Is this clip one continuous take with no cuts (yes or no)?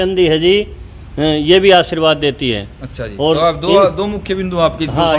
yes